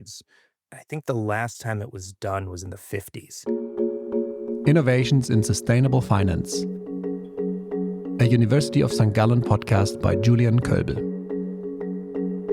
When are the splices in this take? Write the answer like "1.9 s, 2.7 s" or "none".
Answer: 3.4 s